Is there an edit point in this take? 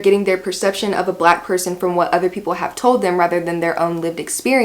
no; 0 cuts

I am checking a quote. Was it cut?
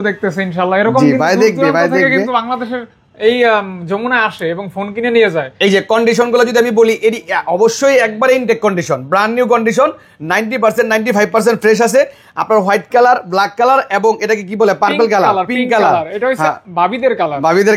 no; 0 cuts

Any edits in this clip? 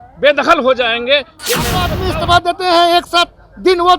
yes; 1 cut; at 1.9 s

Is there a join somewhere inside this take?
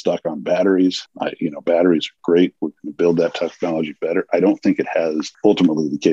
yes; 2 cuts; at 1.1 s, 5.3 s

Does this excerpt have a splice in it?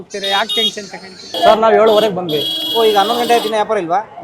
yes; 2 cuts; at 1.3 s, 2.5 s

